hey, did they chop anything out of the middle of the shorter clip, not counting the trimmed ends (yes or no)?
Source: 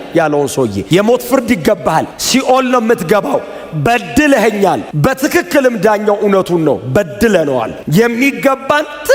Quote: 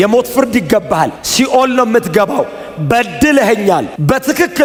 no